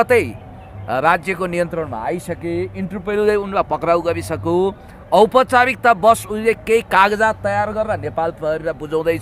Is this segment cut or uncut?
uncut